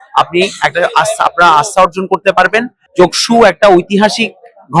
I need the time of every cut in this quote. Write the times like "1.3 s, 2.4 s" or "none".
2.8 s